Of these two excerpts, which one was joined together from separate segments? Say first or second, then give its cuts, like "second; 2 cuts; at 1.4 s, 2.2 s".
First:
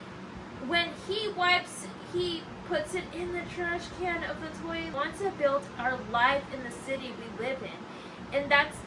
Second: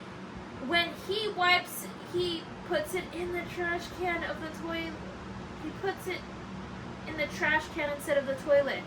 first; 1 cut; at 4.9 s